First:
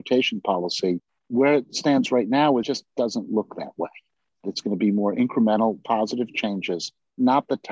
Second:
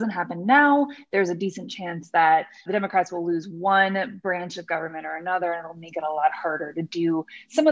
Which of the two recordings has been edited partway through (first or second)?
first